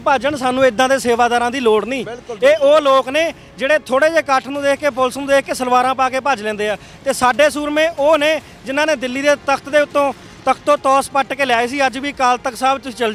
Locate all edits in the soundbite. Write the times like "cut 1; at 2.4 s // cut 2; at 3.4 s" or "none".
none